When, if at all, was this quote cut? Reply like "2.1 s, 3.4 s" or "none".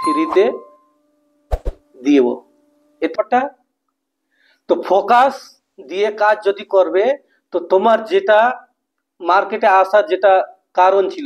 3.1 s